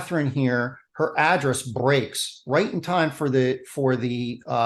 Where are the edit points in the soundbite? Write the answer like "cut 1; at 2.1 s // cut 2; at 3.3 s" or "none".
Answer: none